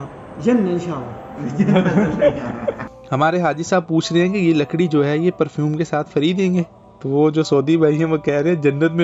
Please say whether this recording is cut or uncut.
uncut